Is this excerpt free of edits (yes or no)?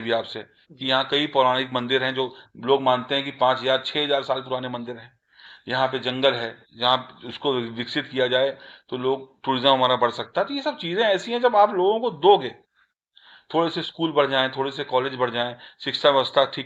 yes